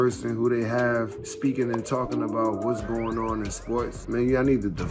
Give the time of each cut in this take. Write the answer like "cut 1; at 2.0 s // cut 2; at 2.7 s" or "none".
cut 1; at 1.2 s // cut 2; at 4.0 s